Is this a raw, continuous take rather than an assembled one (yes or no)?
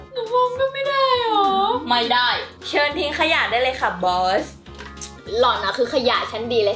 no